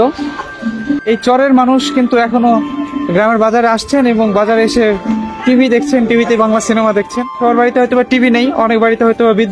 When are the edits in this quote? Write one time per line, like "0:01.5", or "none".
0:01.0
0:07.4